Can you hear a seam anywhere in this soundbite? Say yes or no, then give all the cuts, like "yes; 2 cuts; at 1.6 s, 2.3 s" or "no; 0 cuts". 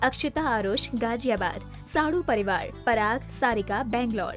yes; 1 cut; at 3.0 s